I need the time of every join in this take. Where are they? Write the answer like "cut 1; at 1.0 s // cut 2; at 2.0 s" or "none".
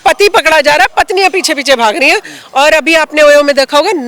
none